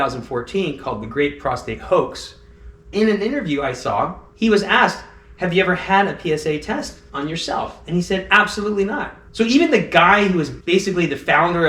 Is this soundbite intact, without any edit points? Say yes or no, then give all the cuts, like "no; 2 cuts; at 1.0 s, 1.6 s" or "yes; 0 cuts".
no; 3 cuts; at 2.9 s, 7.0 s, 9.2 s